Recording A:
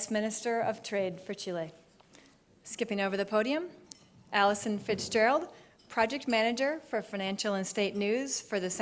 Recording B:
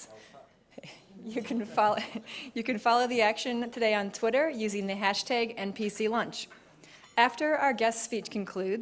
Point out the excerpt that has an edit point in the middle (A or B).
B